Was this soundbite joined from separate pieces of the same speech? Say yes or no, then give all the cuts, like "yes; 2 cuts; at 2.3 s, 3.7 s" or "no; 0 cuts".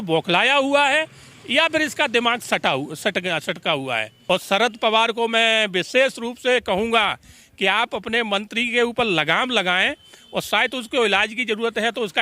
yes; 1 cut; at 4.1 s